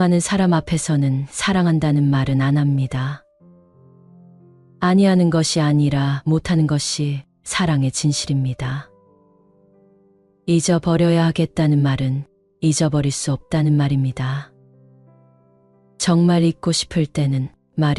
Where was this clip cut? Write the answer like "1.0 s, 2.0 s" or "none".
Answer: 14.5 s, 15.9 s